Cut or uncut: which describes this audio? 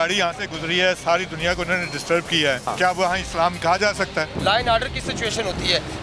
cut